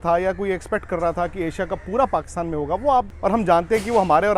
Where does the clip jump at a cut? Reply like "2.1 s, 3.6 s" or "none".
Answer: 3.1 s